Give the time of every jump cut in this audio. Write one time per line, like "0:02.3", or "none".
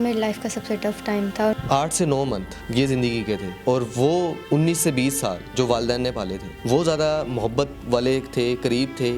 0:01.5
0:02.5
0:03.5
0:04.4
0:05.4
0:06.5
0:07.8